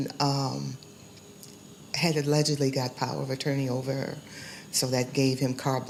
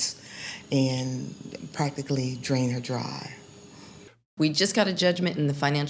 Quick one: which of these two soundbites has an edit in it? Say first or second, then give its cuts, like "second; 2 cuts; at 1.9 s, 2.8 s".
second; 1 cut; at 4.0 s